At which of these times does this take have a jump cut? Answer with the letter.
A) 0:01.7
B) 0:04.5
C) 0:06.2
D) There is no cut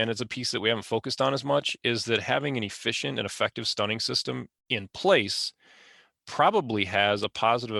B